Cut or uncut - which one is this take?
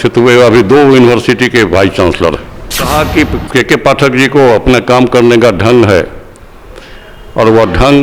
cut